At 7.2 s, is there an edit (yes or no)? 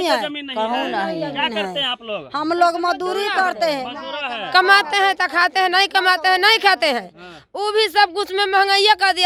no